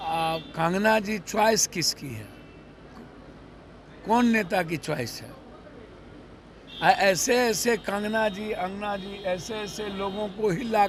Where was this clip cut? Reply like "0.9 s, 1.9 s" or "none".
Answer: none